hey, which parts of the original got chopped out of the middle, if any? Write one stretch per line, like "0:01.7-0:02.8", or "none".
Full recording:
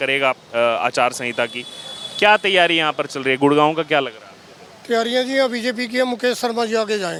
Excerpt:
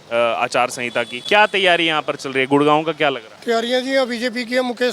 0:01.6-0:02.1
0:04.2-0:04.7